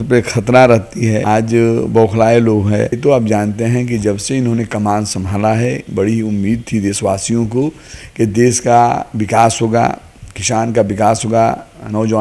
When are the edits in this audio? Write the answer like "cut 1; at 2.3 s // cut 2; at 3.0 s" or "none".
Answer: cut 1; at 1.2 s // cut 2; at 3.0 s